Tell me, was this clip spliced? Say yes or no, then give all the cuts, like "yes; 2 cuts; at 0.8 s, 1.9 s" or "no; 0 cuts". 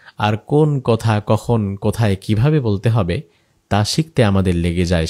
no; 0 cuts